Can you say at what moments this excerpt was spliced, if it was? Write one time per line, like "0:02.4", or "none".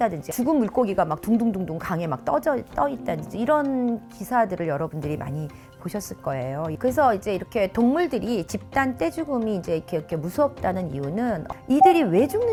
none